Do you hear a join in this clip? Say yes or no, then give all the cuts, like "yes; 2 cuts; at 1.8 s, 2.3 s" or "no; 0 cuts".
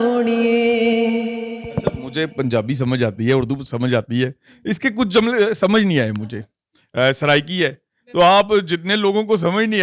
no; 0 cuts